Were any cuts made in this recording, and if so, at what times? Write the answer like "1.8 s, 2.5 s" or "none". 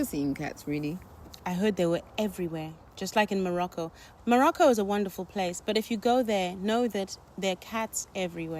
1.3 s, 4.0 s